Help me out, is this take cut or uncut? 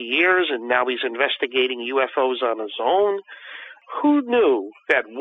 cut